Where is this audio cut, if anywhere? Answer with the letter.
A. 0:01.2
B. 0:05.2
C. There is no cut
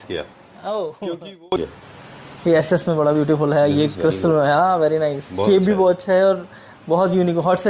A